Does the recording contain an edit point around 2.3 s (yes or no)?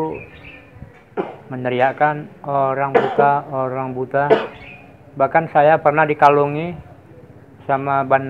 no